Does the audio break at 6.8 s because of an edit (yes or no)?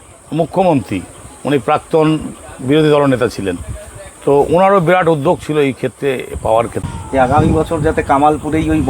yes